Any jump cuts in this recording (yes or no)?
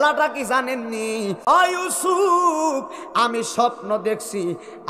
yes